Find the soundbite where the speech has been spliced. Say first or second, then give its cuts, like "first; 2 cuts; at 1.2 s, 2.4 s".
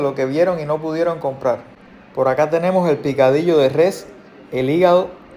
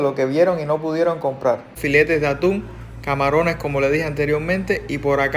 second; 1 cut; at 1.7 s